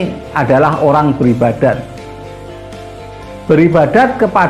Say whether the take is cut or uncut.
cut